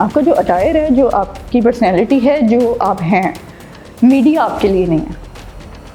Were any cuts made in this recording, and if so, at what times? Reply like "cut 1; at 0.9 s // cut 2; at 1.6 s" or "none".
none